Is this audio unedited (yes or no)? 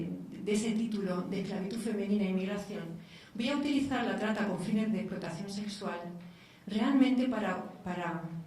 no